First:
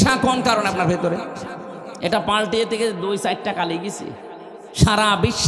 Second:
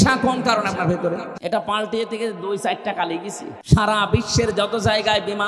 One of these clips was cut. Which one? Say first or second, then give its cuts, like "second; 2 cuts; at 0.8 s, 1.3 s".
second; 2 cuts; at 1.3 s, 3.5 s